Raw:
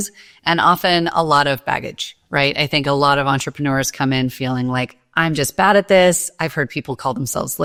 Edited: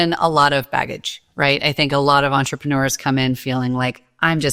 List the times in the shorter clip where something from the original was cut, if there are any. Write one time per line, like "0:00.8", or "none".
none